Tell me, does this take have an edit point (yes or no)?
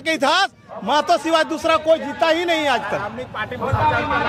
no